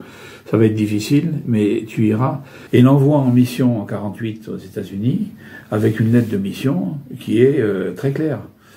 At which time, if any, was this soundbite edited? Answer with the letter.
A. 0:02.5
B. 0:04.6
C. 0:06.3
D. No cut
A